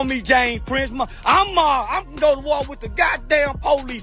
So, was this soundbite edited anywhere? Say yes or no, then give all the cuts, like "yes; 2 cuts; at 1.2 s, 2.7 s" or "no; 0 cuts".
no; 0 cuts